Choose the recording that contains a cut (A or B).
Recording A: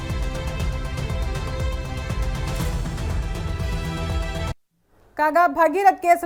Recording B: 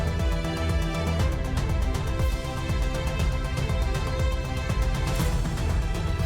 B